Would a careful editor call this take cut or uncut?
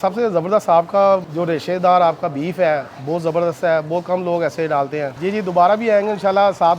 cut